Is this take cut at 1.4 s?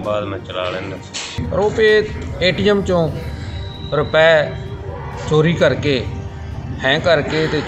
yes; 1 cut; at 1.4 s

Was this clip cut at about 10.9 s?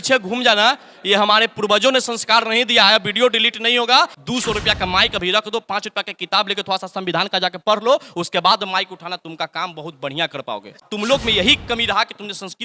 yes; 2 cuts; at 4.2 s, 10.9 s

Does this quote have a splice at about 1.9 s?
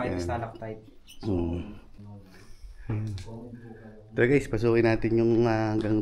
yes; 1 cut; at 1.9 s

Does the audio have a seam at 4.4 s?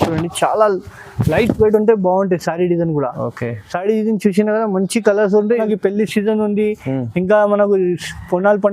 no; 1 cut; at 5.6 s

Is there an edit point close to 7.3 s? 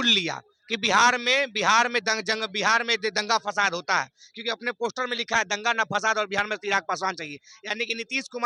no; 0 cuts

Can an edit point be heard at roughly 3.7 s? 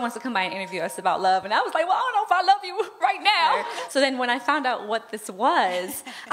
yes; 1 cut; at 3.7 s

